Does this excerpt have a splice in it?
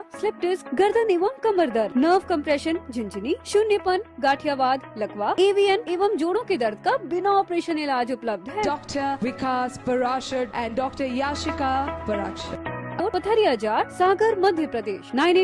yes; 1 cut; at 13.0 s

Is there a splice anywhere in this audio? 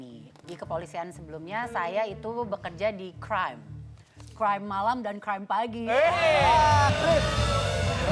no; 0 cuts

